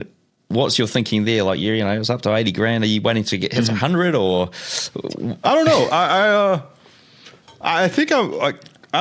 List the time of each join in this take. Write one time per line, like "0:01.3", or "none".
none